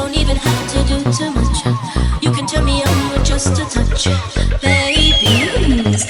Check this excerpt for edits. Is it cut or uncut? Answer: uncut